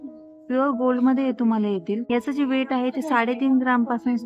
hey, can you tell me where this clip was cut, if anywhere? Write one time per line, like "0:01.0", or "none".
none